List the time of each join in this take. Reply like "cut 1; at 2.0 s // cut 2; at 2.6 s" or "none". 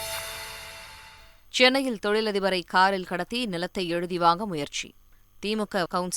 cut 1; at 1.0 s